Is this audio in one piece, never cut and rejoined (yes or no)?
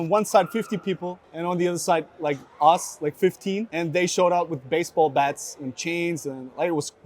no